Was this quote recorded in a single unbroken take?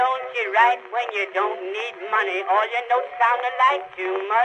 yes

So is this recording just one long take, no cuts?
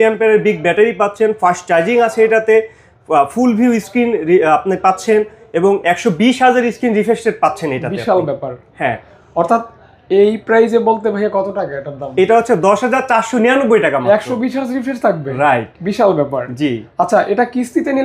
yes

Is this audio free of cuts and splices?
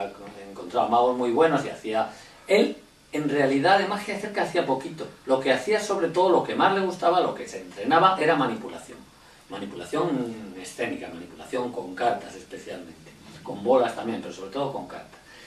yes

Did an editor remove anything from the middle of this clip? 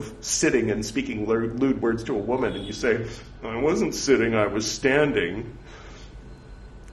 no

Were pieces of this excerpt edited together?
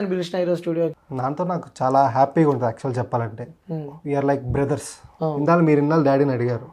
yes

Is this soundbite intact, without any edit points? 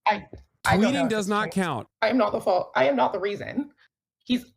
no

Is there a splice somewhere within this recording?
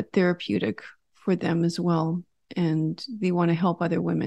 no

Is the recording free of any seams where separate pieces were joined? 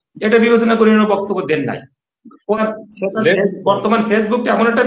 no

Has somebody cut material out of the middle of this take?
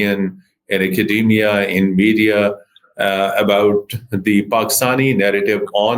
no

